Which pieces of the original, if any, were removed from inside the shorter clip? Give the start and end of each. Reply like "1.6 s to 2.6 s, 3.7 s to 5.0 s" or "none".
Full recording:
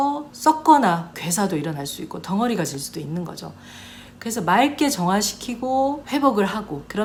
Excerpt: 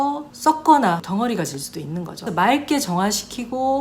1.0 s to 2.2 s, 3.4 s to 4.3 s